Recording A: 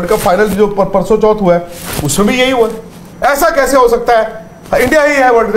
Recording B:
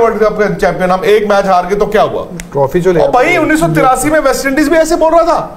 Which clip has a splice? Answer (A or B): A